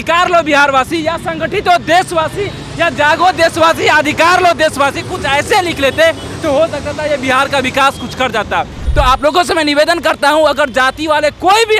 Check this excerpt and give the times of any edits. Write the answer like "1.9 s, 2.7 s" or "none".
8.8 s